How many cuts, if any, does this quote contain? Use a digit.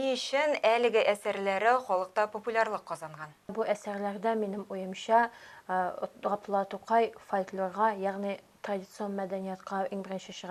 0